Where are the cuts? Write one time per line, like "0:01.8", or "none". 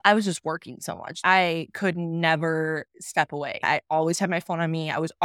0:01.2
0:03.6